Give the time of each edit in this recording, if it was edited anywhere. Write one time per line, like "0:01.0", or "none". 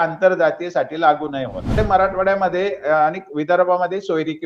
0:01.7